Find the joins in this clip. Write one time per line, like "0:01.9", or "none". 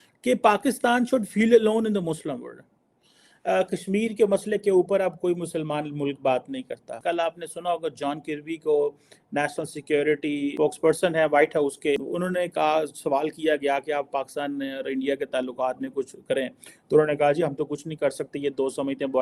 none